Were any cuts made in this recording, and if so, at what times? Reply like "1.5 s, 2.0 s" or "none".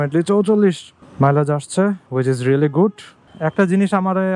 3.2 s